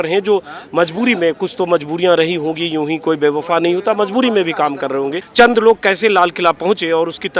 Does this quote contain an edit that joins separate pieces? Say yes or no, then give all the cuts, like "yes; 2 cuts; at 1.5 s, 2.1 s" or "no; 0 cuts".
yes; 1 cut; at 5.2 s